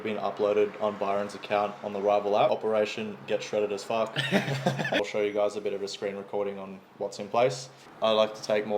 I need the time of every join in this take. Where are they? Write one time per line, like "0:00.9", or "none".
0:02.5
0:05.0
0:07.7